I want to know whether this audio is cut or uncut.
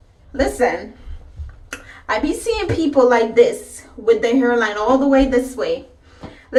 uncut